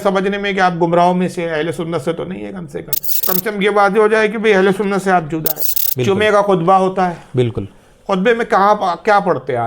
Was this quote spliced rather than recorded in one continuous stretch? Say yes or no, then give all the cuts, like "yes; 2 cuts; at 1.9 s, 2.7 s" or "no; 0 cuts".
yes; 2 cuts; at 3.2 s, 5.5 s